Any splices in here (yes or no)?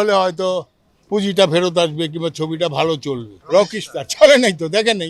yes